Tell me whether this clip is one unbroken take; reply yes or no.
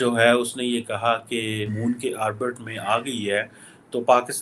no